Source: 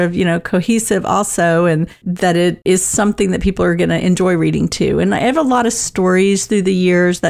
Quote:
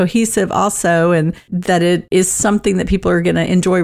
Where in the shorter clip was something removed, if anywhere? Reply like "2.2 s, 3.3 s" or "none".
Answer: none

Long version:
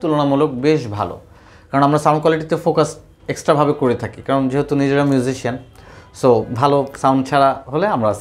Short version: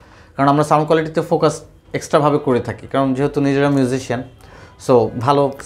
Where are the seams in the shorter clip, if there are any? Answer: none

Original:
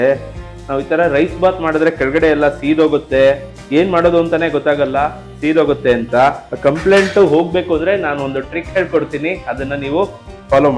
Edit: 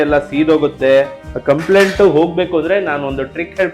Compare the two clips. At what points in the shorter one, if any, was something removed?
1.3 s

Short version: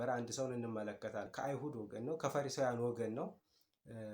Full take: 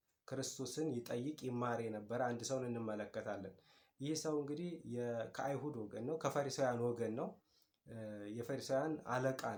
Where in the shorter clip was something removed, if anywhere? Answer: 1.3 s

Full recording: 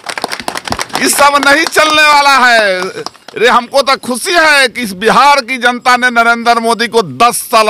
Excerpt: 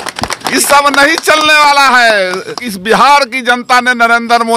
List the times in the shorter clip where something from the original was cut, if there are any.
2.7 s

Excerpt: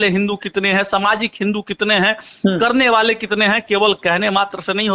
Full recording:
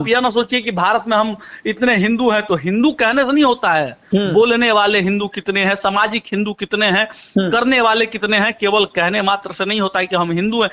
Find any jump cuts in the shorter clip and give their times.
none

